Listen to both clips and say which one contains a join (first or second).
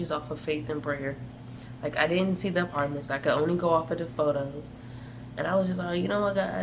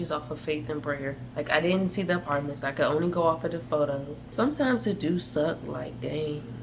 second